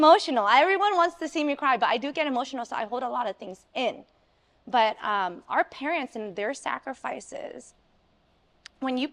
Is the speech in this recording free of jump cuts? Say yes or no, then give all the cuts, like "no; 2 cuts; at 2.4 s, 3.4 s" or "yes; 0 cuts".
yes; 0 cuts